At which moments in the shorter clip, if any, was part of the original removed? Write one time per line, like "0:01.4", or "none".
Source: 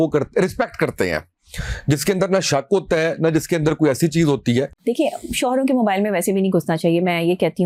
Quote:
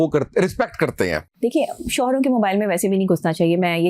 0:01.3

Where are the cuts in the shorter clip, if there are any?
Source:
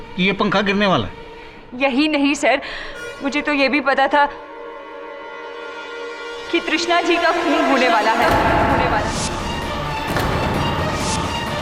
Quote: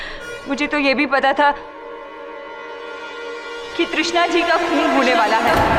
none

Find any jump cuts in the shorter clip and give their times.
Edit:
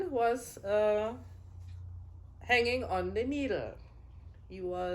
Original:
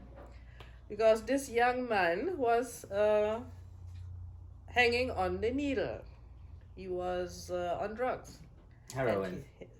none

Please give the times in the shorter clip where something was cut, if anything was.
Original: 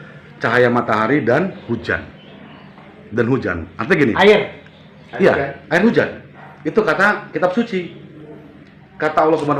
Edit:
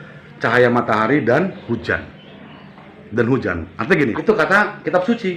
0:04.1

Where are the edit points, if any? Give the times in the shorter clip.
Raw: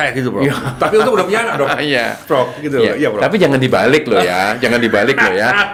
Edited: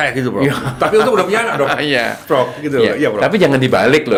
none

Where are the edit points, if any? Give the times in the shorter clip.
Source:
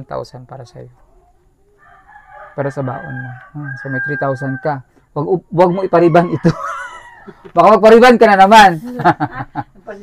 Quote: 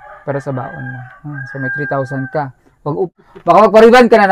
0:03.1

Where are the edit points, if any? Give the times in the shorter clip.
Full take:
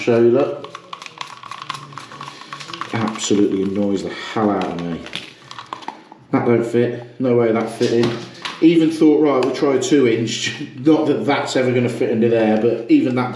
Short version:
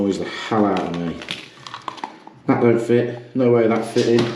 none

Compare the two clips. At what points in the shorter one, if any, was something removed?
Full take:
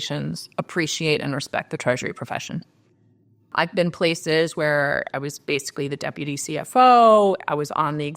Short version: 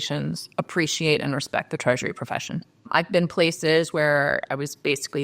0:02.7

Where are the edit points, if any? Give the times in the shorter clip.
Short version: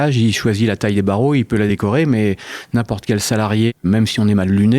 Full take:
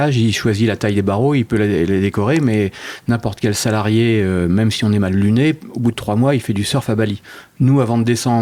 0:01.7
0:03.8

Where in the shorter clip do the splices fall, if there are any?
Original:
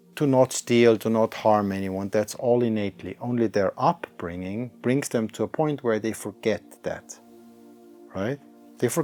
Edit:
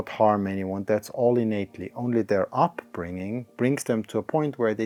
none

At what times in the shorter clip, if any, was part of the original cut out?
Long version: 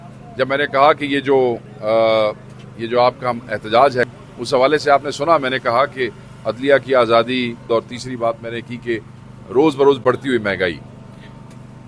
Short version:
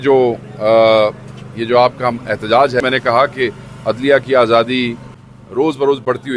0:02.8
0:05.0

